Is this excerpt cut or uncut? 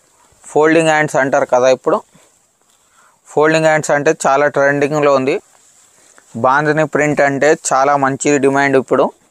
cut